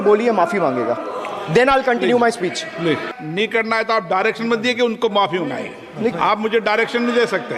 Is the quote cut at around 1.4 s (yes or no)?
no